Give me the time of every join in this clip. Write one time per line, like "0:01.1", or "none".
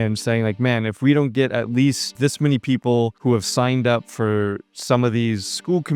0:02.1